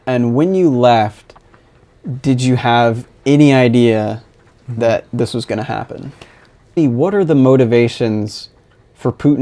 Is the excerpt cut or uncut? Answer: cut